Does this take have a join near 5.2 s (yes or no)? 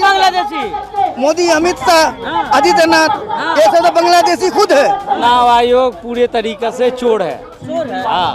yes